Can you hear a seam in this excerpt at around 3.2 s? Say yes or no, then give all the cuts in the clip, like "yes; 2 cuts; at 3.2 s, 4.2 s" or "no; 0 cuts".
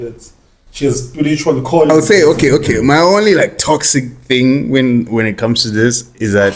no; 1 cut; at 1.9 s